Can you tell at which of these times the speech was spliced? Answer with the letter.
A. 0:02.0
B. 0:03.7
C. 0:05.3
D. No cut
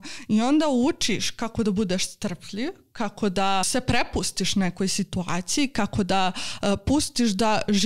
B